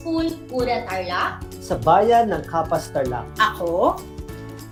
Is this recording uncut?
yes; 0 cuts

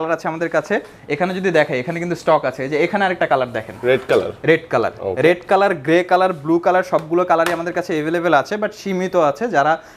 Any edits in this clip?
no; 0 cuts

